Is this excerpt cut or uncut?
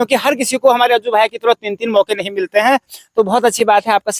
uncut